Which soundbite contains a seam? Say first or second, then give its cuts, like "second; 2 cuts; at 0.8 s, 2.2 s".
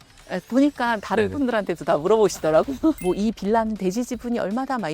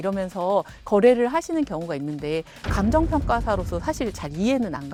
first; 1 cut; at 3.0 s